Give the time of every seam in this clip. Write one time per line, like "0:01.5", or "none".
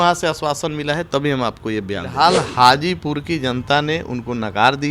0:02.1